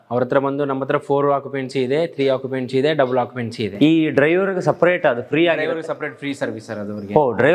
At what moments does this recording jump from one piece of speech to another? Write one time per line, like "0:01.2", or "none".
none